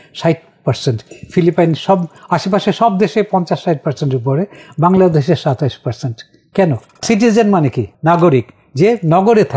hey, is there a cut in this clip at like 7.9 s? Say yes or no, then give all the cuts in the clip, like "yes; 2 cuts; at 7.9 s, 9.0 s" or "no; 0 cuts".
yes; 2 cuts; at 7.0 s, 7.9 s